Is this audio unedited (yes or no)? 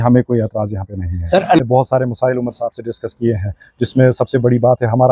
no